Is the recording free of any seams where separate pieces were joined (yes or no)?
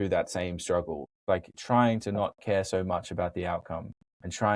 no